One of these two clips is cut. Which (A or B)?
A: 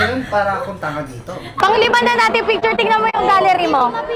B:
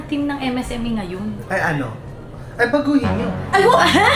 A